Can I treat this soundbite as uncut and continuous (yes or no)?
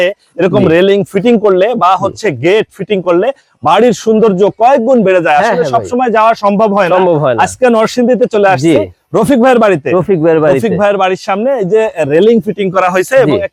yes